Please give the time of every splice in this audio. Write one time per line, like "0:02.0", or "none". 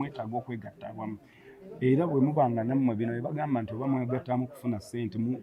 none